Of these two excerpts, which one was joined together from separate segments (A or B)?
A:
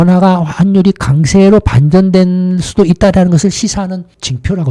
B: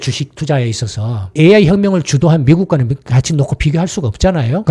B